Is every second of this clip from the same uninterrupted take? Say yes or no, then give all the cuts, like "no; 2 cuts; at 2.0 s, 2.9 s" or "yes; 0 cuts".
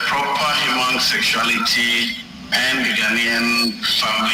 yes; 0 cuts